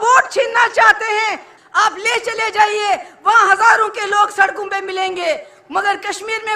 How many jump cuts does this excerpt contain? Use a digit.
1